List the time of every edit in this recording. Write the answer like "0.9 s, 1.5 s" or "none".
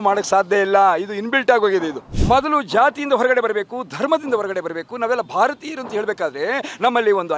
2.1 s